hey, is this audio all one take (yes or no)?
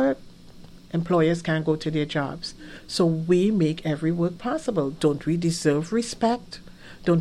yes